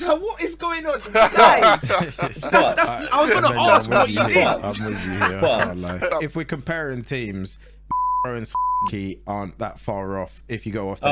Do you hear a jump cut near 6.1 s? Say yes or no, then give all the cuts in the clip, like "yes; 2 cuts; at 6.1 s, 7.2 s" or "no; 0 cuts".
yes; 1 cut; at 6.1 s